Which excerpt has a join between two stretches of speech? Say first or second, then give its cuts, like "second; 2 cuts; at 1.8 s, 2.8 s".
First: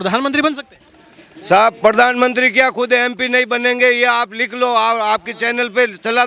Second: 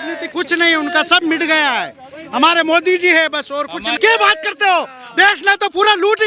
second; 1 cut; at 3.9 s